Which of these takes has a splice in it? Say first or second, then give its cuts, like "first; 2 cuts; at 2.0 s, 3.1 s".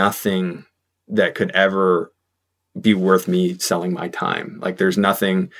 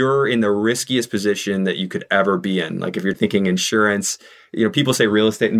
second; 1 cut; at 3.1 s